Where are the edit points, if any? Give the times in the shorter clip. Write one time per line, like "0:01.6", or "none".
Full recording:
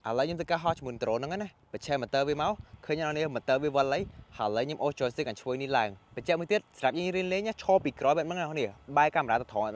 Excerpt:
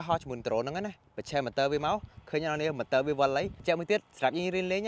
0:03.6